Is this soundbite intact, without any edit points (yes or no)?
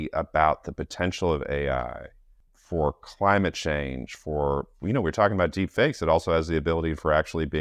yes